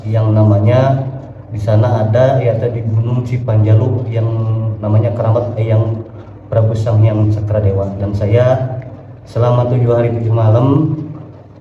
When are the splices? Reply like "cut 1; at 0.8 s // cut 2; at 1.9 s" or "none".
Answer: none